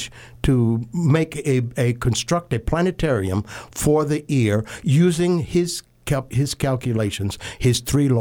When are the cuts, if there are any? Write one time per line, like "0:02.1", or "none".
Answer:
none